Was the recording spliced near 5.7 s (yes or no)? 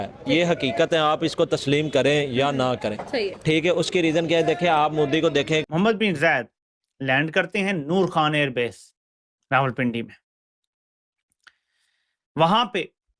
yes